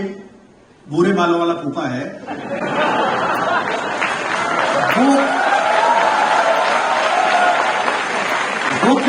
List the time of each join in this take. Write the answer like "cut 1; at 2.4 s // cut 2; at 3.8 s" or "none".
none